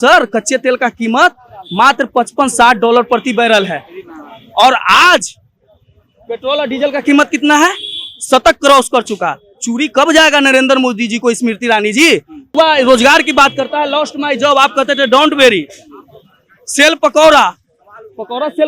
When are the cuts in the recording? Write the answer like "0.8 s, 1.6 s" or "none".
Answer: 12.5 s